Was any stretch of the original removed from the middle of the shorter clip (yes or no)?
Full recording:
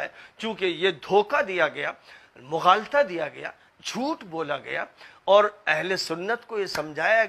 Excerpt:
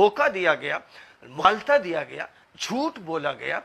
yes